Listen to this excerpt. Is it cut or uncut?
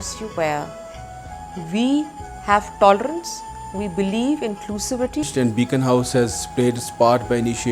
cut